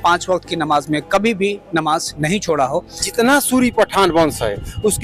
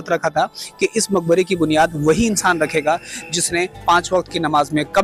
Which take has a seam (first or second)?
first